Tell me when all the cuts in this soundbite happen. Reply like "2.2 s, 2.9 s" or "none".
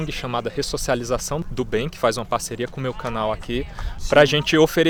none